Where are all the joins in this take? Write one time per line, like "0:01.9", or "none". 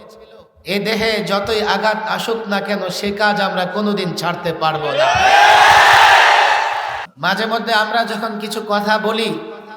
0:07.1